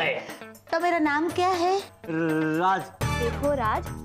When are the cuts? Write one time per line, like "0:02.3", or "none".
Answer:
0:03.0